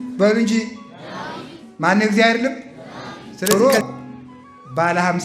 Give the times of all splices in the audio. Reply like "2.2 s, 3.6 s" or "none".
3.5 s

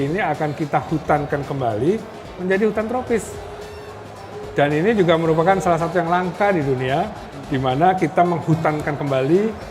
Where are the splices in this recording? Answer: none

